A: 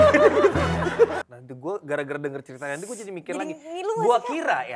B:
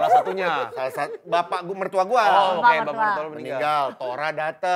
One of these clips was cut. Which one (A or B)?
A